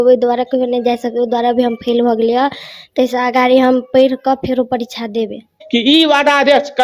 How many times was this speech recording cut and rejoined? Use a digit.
1